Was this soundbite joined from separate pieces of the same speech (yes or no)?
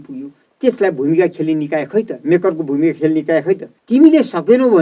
yes